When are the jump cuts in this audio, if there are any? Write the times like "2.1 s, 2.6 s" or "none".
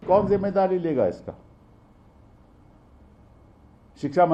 none